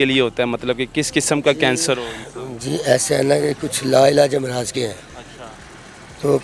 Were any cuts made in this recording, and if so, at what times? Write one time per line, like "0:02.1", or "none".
none